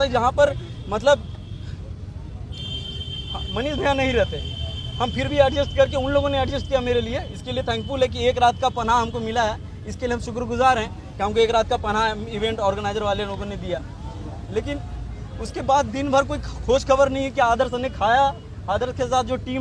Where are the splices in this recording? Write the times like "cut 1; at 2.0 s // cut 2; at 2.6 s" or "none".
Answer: none